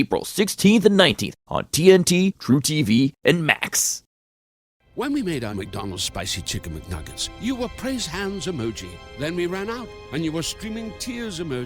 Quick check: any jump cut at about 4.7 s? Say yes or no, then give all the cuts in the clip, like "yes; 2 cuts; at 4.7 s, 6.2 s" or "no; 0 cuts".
yes; 1 cut; at 4.7 s